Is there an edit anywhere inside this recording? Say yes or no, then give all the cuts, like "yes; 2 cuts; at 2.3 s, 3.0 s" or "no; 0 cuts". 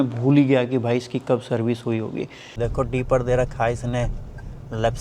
yes; 1 cut; at 2.5 s